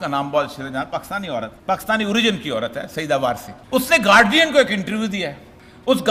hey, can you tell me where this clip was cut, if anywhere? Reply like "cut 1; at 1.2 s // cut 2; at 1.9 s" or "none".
cut 1; at 1.5 s // cut 2; at 3.5 s